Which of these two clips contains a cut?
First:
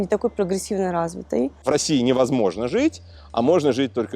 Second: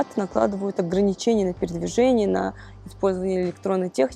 first; 1 cut; at 1.6 s

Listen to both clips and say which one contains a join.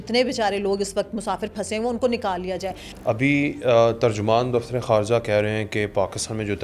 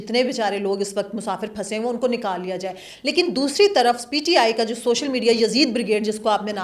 first; 1 cut; at 2.9 s

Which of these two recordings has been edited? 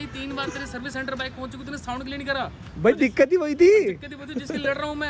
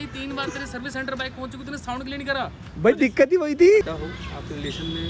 second; 1 cut; at 3.8 s

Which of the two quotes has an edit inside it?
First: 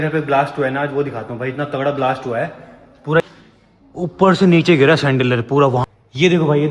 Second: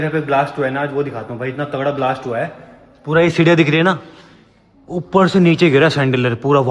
first; 2 cuts; at 3.2 s, 5.8 s

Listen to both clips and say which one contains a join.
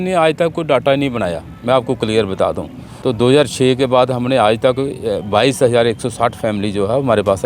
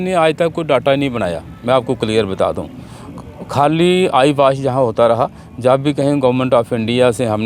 first; 1 cut; at 2.8 s

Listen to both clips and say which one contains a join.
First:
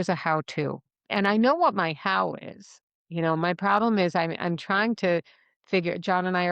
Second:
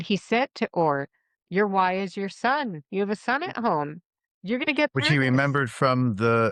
first; 1 cut; at 0.9 s

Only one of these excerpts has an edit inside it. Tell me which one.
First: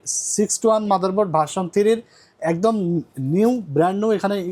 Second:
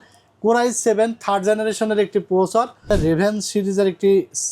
second; 1 cut; at 2.9 s

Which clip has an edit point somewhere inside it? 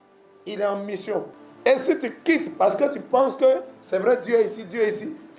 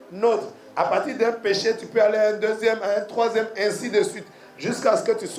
first; 1 cut; at 1.4 s

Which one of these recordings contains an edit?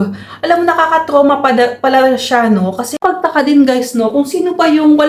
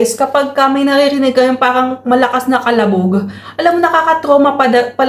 first; 1 cut; at 2.9 s

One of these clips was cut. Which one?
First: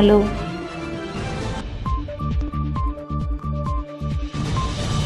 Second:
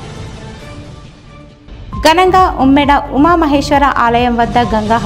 second; 1 cut; at 1.6 s

